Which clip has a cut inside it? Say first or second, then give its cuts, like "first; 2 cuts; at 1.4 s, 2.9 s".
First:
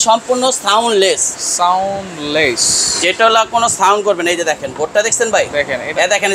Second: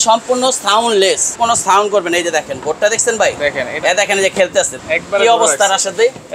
second; 2 cuts; at 1.3 s, 4.8 s